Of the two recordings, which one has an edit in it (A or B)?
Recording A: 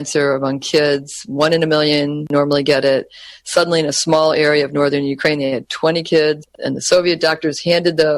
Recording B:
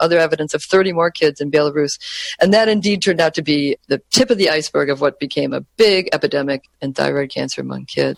A